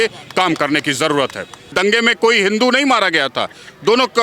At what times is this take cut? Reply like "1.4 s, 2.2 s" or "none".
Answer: 1.7 s